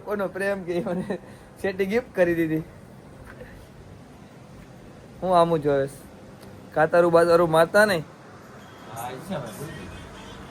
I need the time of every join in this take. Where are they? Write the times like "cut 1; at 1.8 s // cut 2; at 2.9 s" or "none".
none